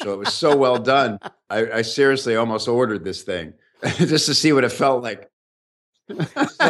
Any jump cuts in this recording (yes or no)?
no